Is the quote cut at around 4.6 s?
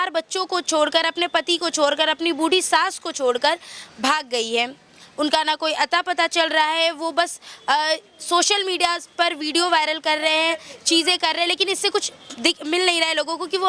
no; 0 cuts

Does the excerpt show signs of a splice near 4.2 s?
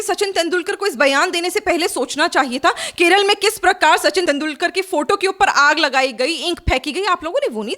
yes; 1 cut; at 4.2 s

